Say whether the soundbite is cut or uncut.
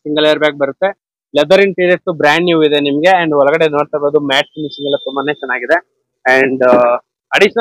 uncut